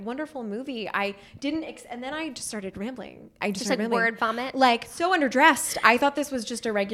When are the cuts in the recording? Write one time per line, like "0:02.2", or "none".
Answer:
0:03.4
0:04.9